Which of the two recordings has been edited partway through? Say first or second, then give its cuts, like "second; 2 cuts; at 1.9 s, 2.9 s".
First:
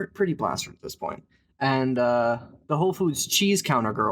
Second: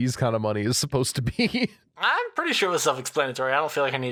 first; 1 cut; at 2.5 s